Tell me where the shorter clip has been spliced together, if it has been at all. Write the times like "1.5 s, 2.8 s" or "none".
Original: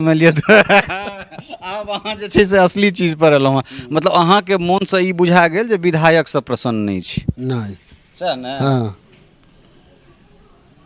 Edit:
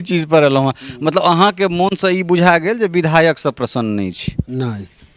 none